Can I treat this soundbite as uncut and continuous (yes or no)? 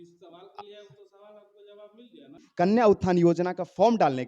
no